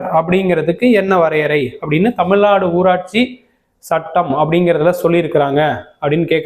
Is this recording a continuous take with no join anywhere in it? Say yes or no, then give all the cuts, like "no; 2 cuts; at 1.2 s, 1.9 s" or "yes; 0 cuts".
yes; 0 cuts